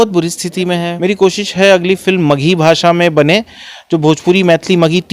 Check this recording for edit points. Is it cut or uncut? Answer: cut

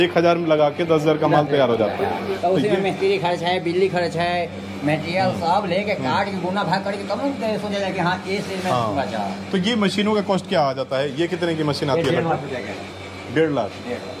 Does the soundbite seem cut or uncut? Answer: uncut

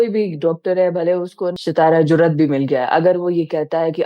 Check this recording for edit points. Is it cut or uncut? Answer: cut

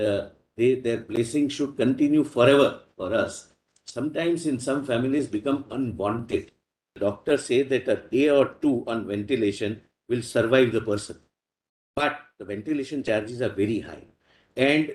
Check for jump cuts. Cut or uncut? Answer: cut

